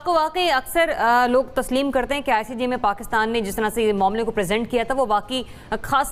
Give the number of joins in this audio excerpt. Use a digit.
0